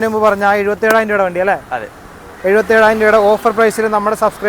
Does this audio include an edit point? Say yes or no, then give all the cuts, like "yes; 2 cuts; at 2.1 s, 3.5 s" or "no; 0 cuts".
no; 0 cuts